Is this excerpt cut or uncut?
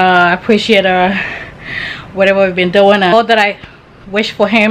cut